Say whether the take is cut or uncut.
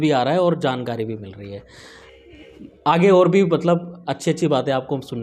uncut